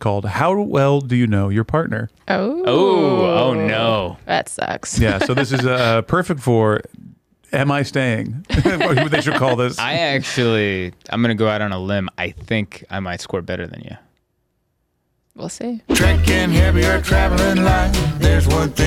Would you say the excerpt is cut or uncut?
cut